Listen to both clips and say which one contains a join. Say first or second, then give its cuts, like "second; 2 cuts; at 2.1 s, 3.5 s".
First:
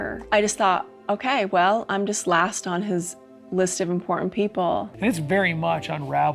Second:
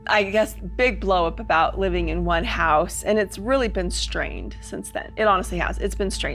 first; 1 cut; at 4.9 s